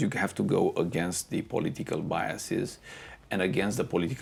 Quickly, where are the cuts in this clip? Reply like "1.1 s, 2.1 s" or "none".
none